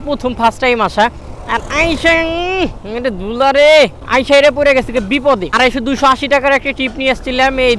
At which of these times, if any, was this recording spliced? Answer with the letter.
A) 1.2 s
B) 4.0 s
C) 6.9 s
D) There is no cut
A